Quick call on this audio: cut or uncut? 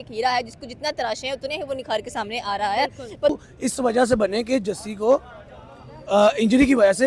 cut